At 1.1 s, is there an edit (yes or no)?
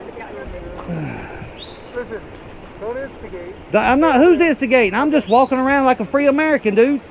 no